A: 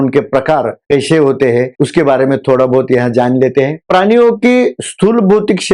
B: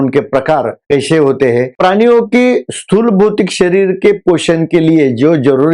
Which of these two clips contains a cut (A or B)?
B